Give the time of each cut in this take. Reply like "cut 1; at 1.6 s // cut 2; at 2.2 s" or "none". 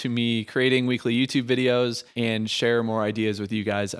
cut 1; at 2.0 s